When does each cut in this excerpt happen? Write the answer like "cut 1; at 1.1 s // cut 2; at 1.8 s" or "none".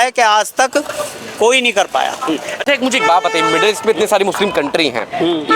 none